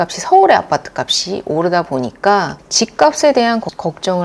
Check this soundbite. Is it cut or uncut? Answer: cut